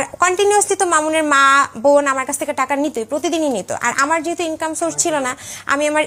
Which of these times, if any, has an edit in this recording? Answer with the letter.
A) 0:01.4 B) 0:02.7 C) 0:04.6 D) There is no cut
D